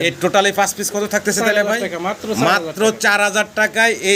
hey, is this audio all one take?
yes; 0 cuts

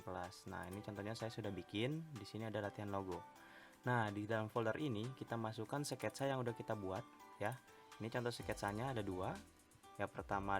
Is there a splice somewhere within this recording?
no; 0 cuts

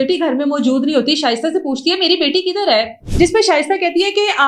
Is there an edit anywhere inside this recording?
yes; 1 cut; at 3.0 s

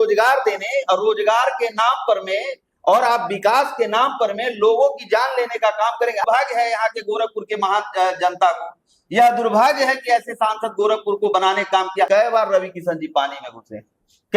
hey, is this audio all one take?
no; 2 cuts; at 6.2 s, 12.1 s

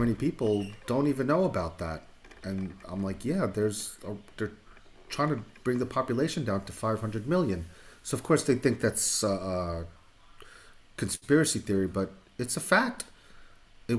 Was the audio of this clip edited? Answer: no; 0 cuts

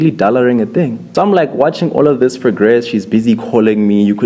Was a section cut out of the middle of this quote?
yes; 1 cut; at 1.0 s

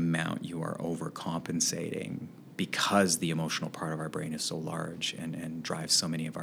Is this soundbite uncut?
yes; 0 cuts

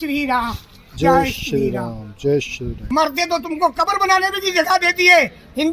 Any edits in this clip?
yes; 1 cut; at 2.8 s

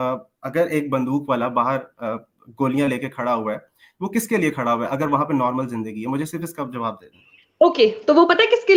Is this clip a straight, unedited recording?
yes; 0 cuts

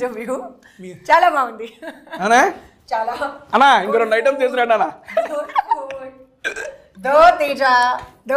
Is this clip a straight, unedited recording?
yes; 0 cuts

